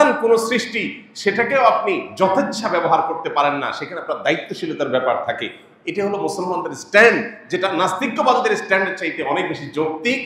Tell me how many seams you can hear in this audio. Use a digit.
0